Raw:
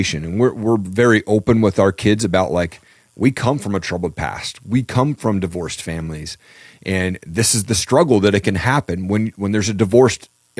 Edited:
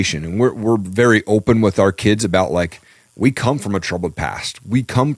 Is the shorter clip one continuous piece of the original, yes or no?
yes